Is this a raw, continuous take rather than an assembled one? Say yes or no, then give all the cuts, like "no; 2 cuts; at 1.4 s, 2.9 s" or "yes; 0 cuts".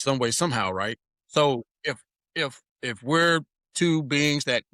no; 3 cuts; at 1.1 s, 2.7 s, 3.6 s